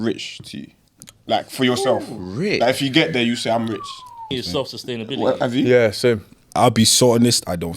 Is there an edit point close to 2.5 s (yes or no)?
no